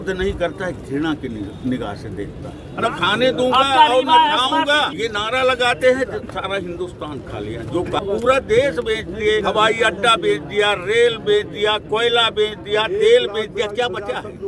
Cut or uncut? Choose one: cut